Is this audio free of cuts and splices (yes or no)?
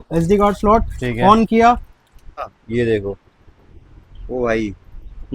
no